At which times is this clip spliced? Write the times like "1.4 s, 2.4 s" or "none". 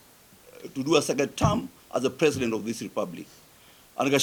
none